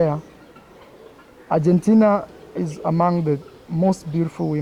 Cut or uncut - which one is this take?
uncut